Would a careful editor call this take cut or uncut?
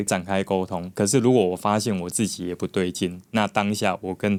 uncut